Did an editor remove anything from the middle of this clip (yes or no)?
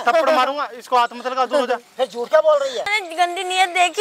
yes